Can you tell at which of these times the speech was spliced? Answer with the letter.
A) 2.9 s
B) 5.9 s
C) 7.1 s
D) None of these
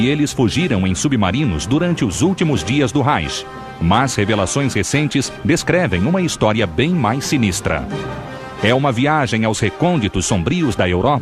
A